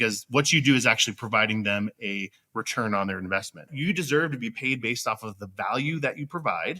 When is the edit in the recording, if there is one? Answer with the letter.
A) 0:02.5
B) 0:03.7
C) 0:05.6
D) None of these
B